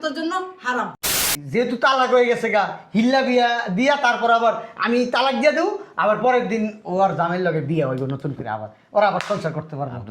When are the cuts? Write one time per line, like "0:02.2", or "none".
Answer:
0:01.3